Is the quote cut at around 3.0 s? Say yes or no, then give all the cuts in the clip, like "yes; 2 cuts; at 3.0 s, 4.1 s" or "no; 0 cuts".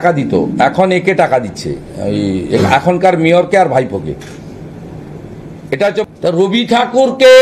no; 1 cut; at 6.0 s